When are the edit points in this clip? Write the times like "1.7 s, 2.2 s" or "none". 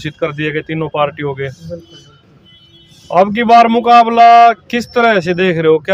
none